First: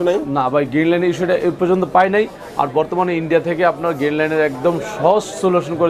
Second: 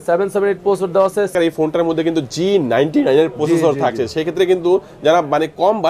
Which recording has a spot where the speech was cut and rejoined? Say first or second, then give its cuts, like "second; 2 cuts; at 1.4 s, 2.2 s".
second; 1 cut; at 1.3 s